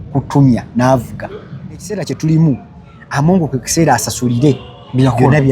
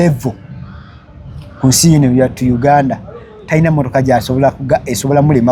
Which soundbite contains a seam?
first; 1 cut; at 1.9 s

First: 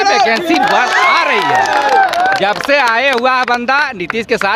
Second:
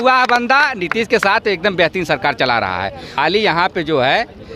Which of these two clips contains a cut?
second; 1 cut; at 3.1 s

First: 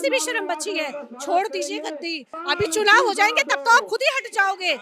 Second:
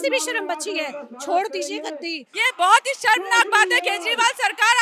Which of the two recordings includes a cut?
second; 1 cut; at 2.3 s

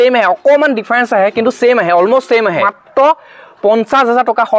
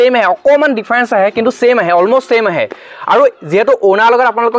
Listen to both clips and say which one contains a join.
first; 1 cut; at 2.8 s

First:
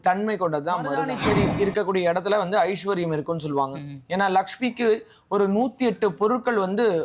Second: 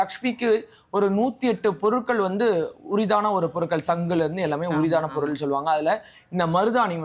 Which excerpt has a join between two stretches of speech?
first; 1 cut; at 1.1 s

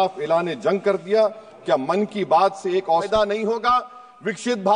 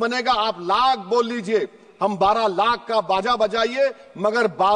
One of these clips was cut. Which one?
first; 1 cut; at 3.1 s

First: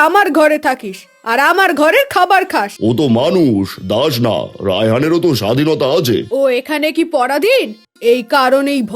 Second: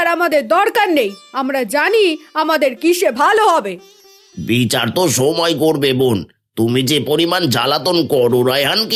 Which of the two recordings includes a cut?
first; 3 cuts; at 2.7 s, 6.3 s, 7.8 s

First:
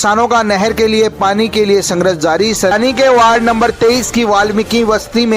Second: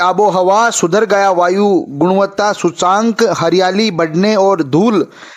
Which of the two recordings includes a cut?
first; 1 cut; at 2.7 s

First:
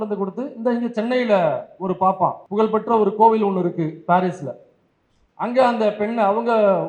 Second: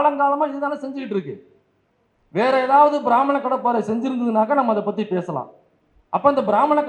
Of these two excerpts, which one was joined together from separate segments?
first; 1 cut; at 2.4 s

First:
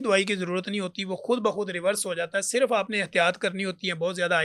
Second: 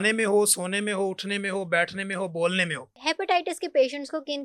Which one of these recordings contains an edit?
second; 1 cut; at 2.9 s

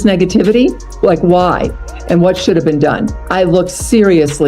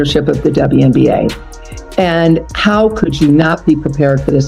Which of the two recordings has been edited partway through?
first; 2 cuts; at 0.9 s, 3.2 s

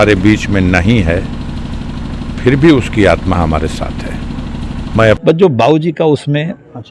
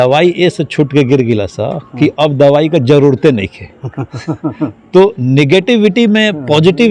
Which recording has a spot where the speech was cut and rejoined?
first; 1 cut; at 5.2 s

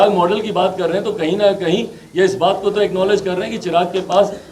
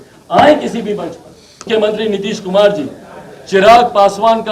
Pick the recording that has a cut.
second; 1 cut; at 1.7 s

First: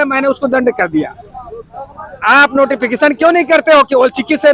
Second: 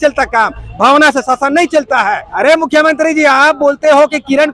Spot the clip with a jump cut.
second; 1 cut; at 2.3 s

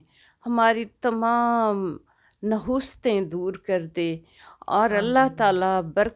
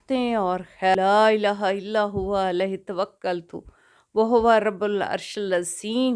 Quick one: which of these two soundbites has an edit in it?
second; 1 cut; at 1.0 s

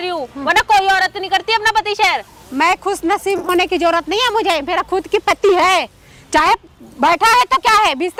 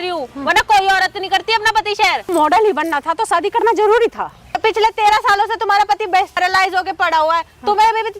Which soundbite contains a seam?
second; 3 cuts; at 2.3 s, 4.6 s, 6.4 s

